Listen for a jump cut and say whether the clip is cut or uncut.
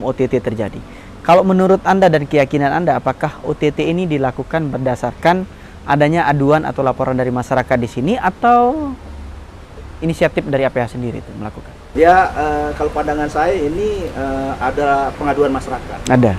uncut